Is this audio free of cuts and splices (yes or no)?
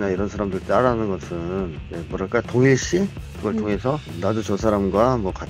no